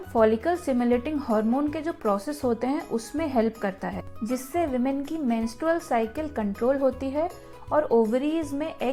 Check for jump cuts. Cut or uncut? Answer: uncut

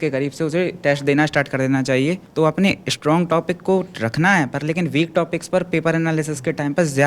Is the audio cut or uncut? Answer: cut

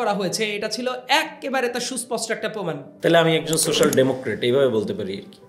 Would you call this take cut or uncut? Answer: cut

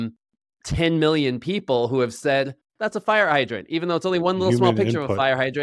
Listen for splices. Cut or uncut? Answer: uncut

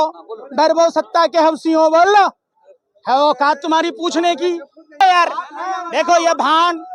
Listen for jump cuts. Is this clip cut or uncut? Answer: cut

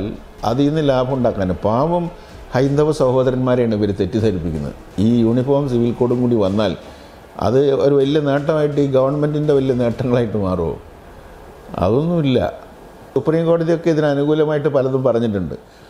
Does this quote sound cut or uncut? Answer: uncut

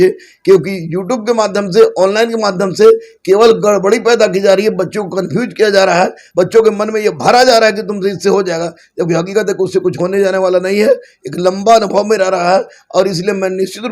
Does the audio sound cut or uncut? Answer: uncut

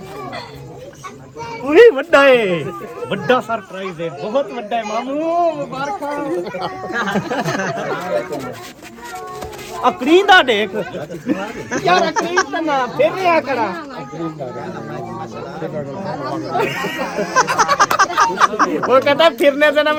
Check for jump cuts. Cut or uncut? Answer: uncut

